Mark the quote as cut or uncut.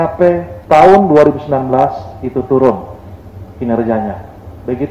uncut